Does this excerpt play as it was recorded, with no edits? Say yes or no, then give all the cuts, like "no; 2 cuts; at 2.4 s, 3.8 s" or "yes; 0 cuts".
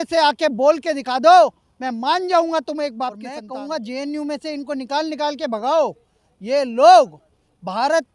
no; 1 cut; at 3.3 s